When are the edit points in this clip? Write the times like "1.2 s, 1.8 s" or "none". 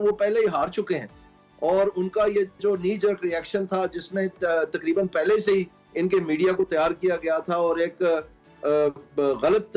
none